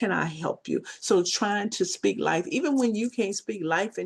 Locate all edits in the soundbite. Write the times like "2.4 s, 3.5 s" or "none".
none